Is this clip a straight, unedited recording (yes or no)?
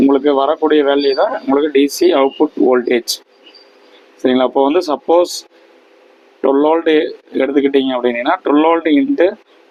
yes